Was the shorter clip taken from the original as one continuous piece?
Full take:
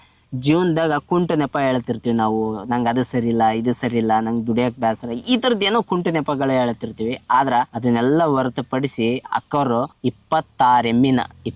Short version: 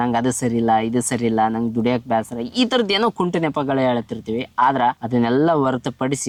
yes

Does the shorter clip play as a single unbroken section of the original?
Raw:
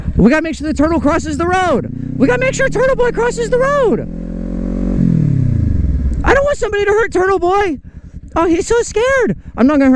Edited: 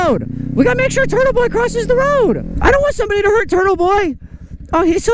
no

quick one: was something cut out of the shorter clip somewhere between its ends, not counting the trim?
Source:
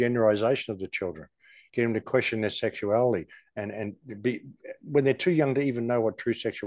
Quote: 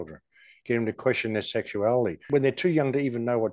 yes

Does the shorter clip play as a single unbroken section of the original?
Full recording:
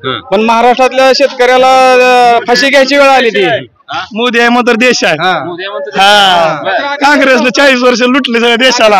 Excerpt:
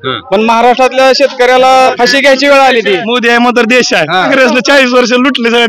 no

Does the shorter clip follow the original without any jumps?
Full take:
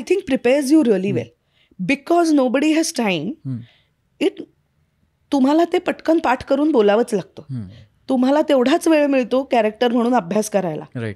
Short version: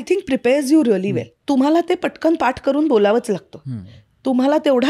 no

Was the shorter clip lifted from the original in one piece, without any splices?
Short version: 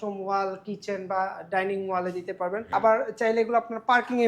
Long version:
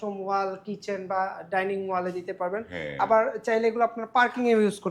no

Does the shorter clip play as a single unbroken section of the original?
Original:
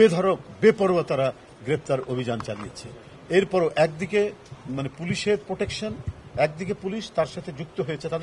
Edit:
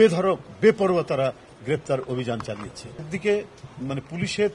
no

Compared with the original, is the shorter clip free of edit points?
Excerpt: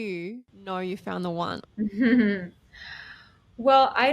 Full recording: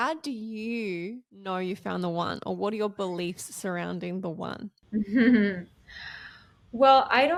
no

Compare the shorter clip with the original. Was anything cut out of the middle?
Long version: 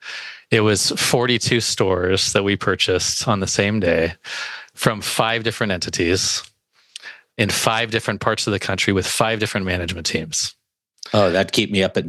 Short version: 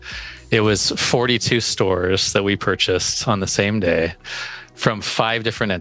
no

